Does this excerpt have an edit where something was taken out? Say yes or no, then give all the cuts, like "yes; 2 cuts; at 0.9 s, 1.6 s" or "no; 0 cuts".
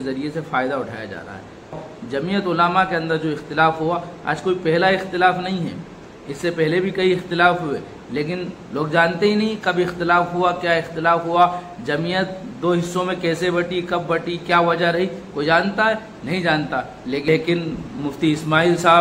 yes; 2 cuts; at 1.8 s, 17.3 s